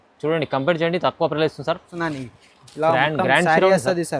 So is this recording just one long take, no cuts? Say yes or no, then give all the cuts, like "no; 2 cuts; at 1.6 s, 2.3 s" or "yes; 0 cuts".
no; 1 cut; at 1.9 s